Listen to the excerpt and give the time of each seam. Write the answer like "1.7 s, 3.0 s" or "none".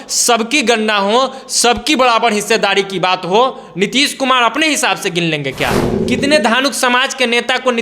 5.9 s